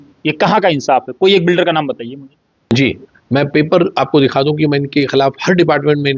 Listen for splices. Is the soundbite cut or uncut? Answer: cut